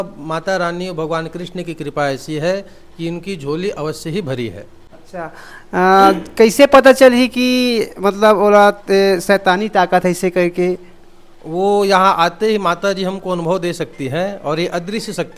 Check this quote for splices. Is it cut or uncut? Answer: uncut